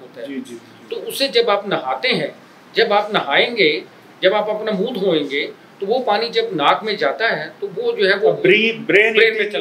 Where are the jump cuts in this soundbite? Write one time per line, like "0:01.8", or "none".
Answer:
none